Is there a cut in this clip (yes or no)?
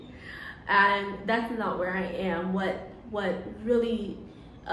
no